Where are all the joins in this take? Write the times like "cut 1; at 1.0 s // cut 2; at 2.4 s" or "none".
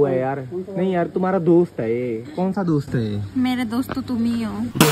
none